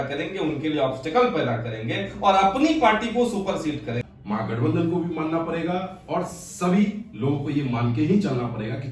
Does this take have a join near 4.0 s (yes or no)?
yes